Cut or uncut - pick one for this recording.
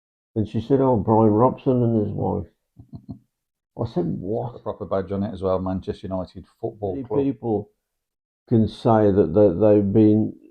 cut